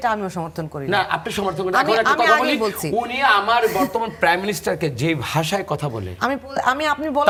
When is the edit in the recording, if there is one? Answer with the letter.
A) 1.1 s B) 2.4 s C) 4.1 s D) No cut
D